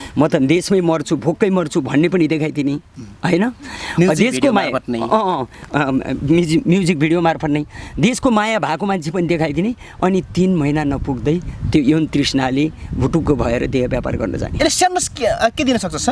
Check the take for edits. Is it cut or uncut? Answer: uncut